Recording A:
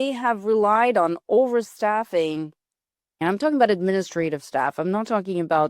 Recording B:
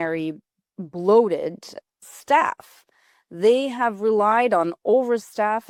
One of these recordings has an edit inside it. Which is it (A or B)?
A